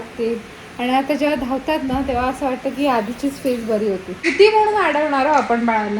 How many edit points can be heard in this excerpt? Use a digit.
1